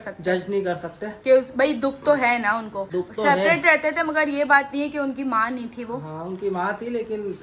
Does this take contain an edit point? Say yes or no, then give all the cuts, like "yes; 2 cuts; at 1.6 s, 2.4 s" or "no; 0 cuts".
no; 0 cuts